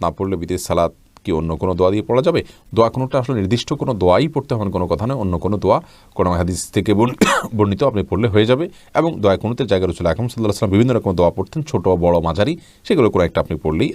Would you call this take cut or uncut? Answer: uncut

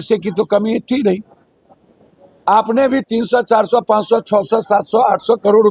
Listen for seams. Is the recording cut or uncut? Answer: uncut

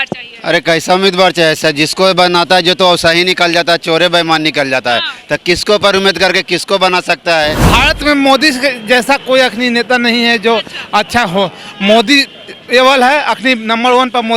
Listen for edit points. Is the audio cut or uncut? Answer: cut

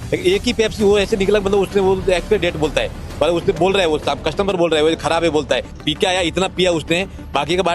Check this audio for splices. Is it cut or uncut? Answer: cut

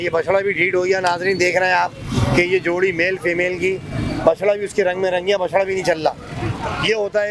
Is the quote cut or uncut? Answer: uncut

